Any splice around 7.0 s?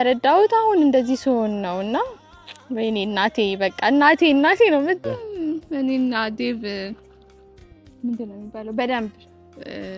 no; 1 cut; at 5.0 s

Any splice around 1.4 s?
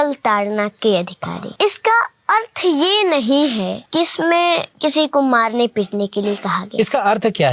yes; 3 cuts; at 1.4 s, 3.8 s, 4.7 s

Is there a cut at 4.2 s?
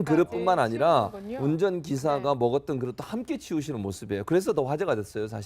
no; 1 cut; at 1.5 s

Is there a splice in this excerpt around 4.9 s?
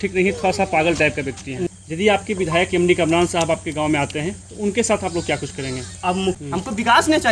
no; 2 cuts; at 1.6 s, 6.4 s

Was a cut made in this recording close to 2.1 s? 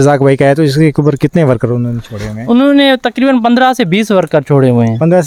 no; 0 cuts

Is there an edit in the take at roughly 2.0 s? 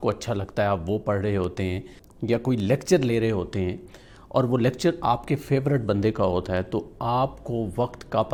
no; 0 cuts

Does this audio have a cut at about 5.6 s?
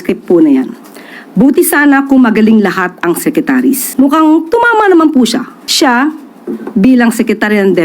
yes; 2 cuts; at 3.9 s, 5.6 s

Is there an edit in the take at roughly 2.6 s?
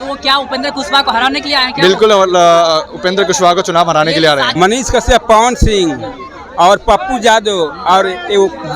no; 1 cut; at 4.5 s

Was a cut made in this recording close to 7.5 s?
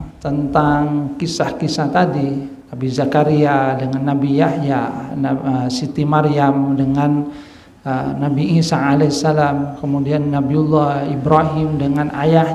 no; 0 cuts

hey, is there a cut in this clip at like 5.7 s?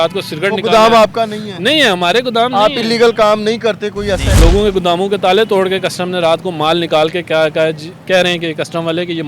no; 1 cut; at 4.3 s

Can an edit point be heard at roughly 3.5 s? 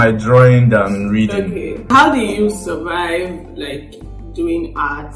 no; 1 cut; at 1.9 s

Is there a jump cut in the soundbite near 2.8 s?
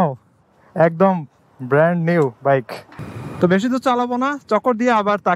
yes; 1 cut; at 2.8 s

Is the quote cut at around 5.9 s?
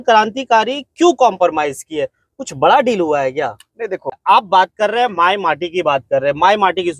no; 1 cut; at 4.2 s

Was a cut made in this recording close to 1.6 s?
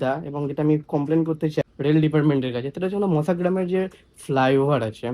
yes; 1 cut; at 1.6 s

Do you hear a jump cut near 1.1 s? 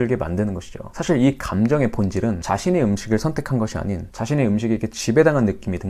no; 1 cut; at 2.4 s

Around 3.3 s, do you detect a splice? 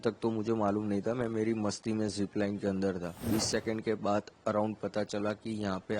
yes; 1 cut; at 3.3 s

